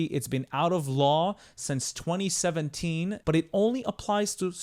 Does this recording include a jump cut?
yes; 1 cut; at 3.2 s

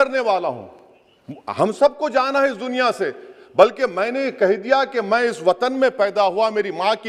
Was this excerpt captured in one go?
yes; 0 cuts

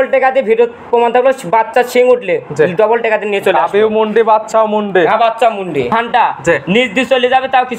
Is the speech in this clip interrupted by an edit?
yes; 1 cut; at 5.9 s

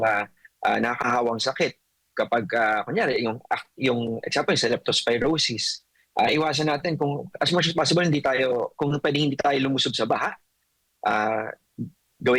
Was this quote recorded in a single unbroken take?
yes; 0 cuts

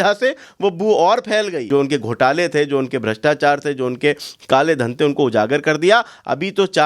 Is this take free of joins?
no; 1 cut; at 1.6 s

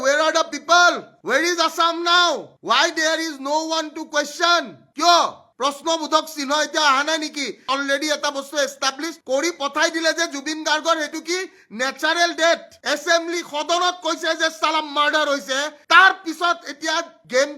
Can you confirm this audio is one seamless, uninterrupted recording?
yes; 0 cuts

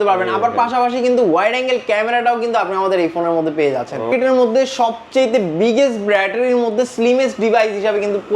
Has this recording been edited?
yes; 1 cut; at 4.1 s

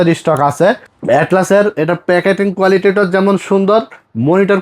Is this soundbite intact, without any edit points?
no; 1 cut; at 0.9 s

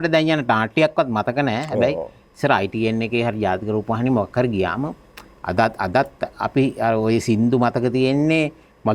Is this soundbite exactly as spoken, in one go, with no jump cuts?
yes; 0 cuts

